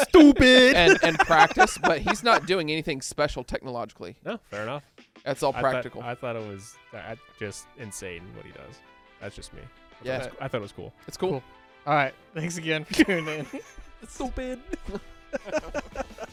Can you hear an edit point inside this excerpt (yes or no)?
no